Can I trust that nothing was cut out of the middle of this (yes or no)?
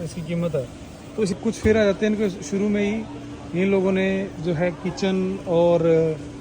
no